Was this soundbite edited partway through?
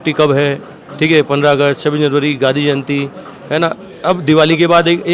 no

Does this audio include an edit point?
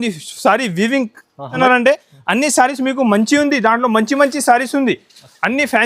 yes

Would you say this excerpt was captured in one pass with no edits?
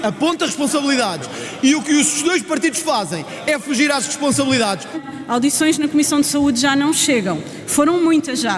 no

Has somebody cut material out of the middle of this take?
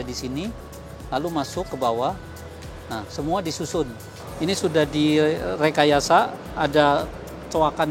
yes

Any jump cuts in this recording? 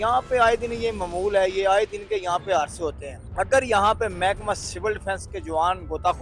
no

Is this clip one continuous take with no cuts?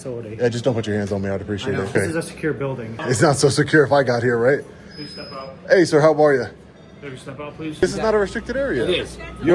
no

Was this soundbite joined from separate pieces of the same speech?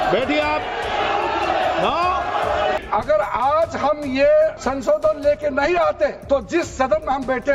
yes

